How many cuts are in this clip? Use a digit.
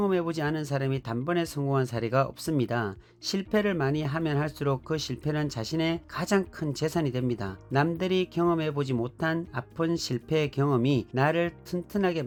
0